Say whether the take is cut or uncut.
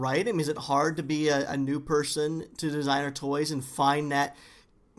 uncut